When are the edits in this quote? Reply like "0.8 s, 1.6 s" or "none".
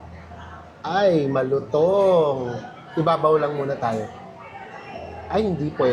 none